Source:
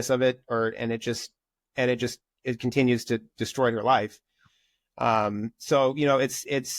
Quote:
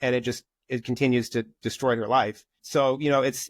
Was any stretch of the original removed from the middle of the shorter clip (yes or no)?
yes